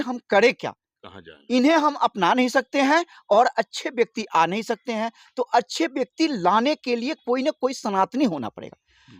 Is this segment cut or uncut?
uncut